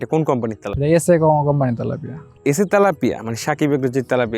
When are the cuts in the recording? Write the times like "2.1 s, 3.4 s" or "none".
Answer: 2.3 s